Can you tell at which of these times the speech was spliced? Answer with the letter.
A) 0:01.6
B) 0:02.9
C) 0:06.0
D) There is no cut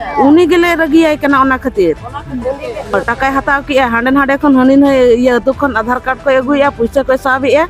B